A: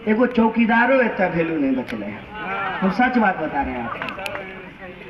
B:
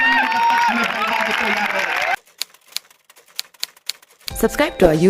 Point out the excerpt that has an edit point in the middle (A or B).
B